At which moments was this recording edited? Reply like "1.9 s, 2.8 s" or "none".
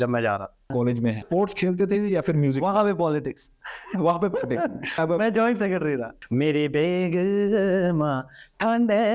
1.1 s, 5.0 s, 6.1 s